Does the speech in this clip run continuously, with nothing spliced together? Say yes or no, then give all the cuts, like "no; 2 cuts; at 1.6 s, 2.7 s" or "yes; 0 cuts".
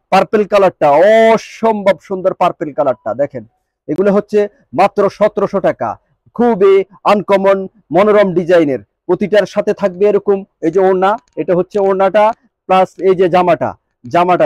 yes; 0 cuts